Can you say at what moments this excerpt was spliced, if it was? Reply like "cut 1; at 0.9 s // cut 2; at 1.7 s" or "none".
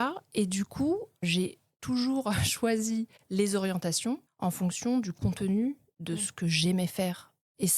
cut 1; at 1.3 s // cut 2; at 3.2 s // cut 3; at 4.3 s